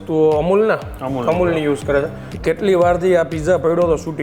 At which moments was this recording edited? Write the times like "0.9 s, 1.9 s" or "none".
2.2 s